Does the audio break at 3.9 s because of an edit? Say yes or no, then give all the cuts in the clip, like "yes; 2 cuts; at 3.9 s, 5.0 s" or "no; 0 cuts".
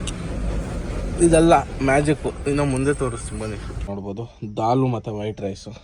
yes; 1 cut; at 3.9 s